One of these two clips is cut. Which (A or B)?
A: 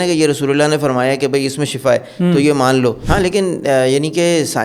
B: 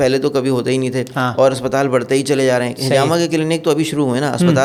A